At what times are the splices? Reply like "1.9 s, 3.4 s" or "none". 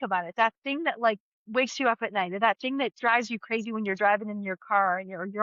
1.3 s, 2.9 s